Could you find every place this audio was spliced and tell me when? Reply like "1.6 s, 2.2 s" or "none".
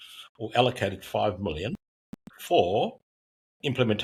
none